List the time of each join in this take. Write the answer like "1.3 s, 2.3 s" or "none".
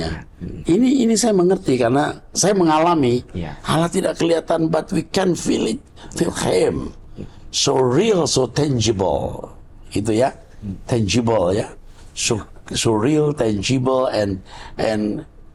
none